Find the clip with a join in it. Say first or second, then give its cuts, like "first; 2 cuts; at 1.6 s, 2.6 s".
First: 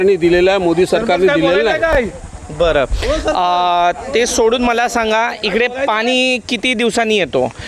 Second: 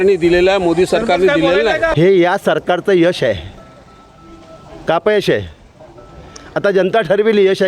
second; 1 cut; at 1.9 s